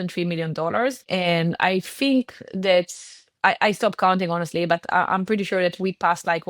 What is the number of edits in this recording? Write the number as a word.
one